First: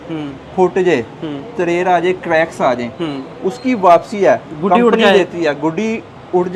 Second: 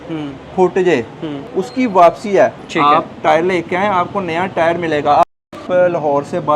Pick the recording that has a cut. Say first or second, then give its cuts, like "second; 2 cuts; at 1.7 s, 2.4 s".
second; 3 cuts; at 1.4 s, 2.6 s, 5.2 s